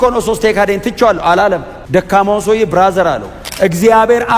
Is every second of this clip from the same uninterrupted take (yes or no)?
no